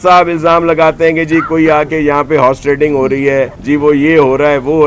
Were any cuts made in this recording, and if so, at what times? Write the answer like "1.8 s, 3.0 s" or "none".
3.6 s